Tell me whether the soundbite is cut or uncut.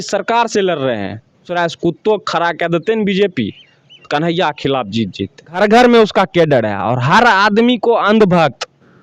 cut